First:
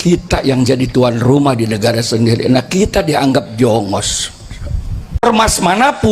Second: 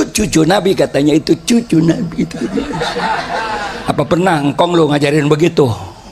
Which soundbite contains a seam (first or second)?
first